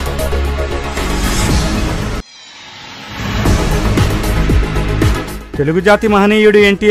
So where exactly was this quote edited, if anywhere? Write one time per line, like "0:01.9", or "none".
0:02.4
0:04.6